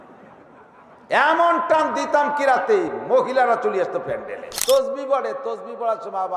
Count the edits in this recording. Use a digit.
1